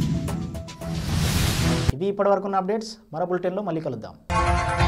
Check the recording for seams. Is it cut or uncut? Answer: uncut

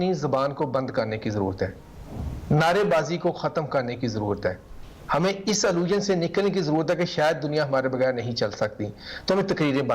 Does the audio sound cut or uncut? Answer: uncut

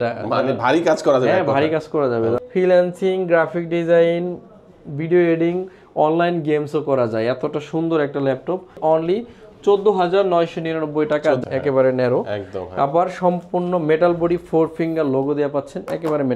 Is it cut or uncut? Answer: cut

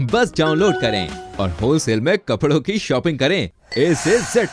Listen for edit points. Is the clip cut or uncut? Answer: uncut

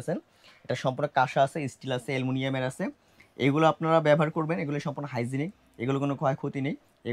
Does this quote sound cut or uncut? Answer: uncut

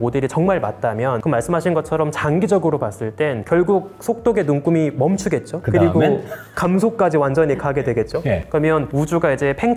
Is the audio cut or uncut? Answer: uncut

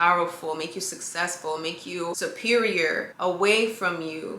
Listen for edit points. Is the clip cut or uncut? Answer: cut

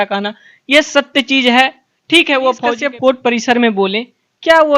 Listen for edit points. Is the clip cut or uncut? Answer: cut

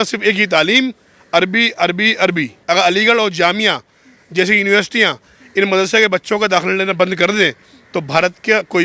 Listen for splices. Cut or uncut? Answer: cut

